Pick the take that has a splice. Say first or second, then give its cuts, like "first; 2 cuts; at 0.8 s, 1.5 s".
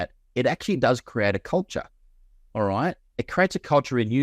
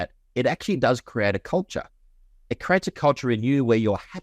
second; 1 cut; at 2.4 s